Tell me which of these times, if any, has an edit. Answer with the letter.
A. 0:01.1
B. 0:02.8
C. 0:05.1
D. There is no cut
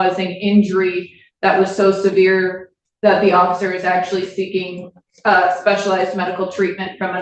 D